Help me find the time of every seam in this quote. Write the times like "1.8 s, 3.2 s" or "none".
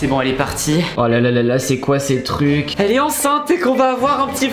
0.9 s, 2.7 s